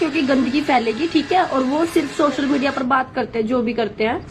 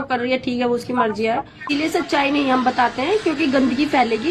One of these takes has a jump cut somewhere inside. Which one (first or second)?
second